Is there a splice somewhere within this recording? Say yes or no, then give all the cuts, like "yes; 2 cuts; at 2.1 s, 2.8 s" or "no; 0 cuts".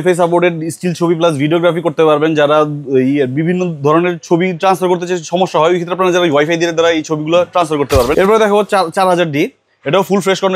yes; 1 cut; at 8.1 s